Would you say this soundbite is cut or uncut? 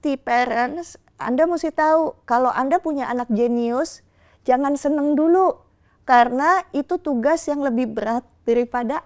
uncut